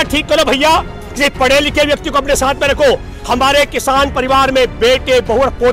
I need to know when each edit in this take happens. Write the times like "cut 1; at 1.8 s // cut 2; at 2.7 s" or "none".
none